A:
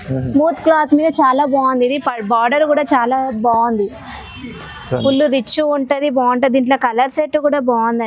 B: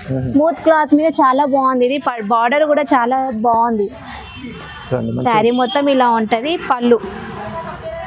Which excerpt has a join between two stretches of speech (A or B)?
A